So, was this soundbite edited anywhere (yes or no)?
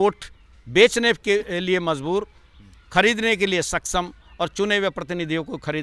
no